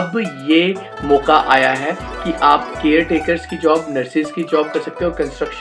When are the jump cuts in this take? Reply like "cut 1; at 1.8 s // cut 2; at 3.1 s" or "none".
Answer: none